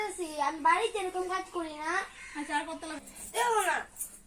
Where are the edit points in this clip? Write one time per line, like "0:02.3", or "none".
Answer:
0:02.9

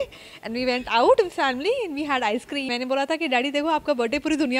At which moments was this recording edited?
0:02.7

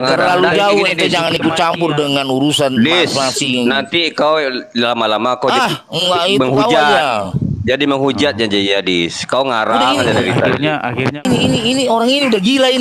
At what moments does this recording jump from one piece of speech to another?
0:11.2

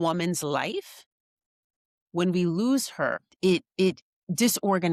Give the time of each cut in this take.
none

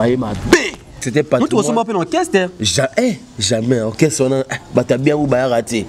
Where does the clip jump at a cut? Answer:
0:01.0

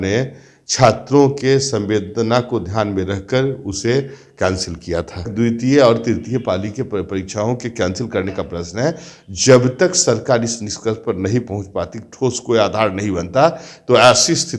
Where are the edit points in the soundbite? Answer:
0:05.3

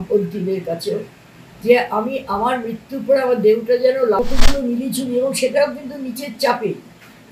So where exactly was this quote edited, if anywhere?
0:04.2

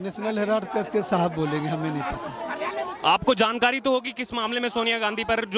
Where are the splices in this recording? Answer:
none

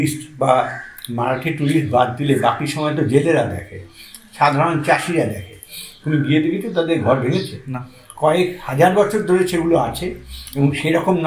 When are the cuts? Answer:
none

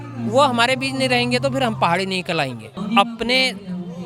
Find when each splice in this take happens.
0:02.7

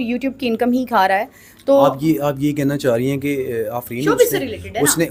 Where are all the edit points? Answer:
none

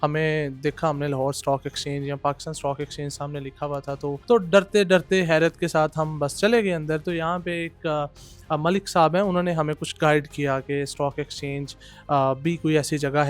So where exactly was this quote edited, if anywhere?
0:04.2

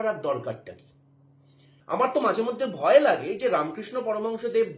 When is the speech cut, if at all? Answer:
0:01.7

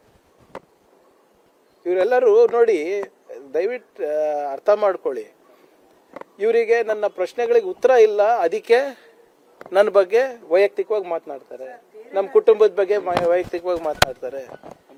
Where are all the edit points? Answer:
none

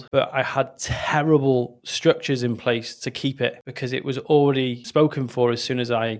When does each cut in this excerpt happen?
none

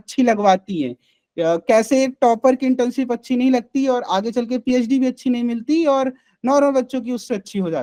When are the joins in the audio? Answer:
none

